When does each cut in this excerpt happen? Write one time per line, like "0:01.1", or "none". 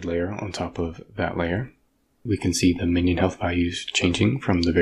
0:02.2